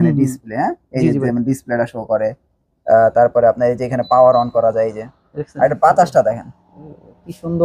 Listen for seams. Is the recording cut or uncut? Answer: uncut